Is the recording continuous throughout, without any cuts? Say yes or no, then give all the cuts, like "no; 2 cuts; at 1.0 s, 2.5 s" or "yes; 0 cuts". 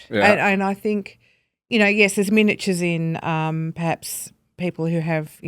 yes; 0 cuts